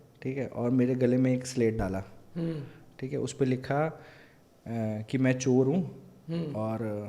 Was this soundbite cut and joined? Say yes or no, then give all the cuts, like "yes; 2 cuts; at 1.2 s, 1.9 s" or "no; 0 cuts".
no; 0 cuts